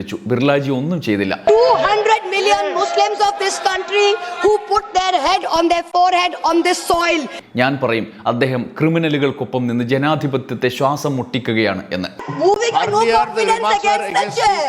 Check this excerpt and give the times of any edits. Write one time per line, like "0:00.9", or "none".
0:01.5
0:07.3
0:12.2